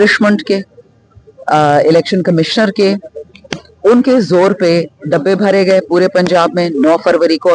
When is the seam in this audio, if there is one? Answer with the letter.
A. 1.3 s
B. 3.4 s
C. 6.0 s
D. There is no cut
D